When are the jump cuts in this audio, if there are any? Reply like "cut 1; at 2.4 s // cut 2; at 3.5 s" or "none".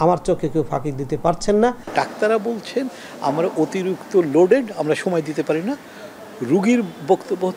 cut 1; at 1.8 s